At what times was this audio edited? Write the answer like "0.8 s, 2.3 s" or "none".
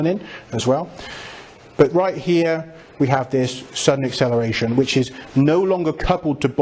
none